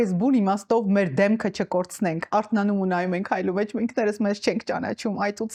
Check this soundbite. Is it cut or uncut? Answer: uncut